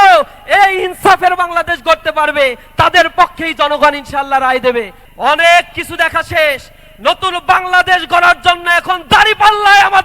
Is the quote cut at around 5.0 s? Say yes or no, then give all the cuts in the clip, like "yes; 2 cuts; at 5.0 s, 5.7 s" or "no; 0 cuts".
yes; 1 cut; at 5.0 s